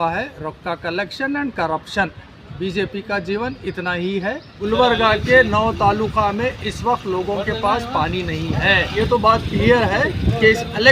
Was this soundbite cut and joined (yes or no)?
yes